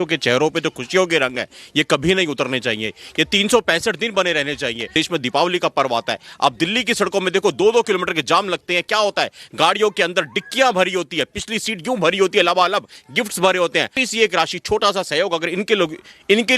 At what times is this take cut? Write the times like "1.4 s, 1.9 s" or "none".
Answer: 4.9 s, 14.0 s